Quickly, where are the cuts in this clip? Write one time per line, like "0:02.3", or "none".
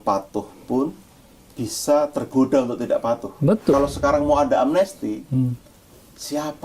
0:03.7